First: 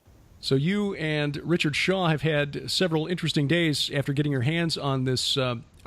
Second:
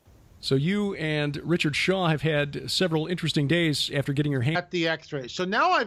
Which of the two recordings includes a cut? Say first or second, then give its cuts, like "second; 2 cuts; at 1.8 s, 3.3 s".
first; 1 cut; at 4.5 s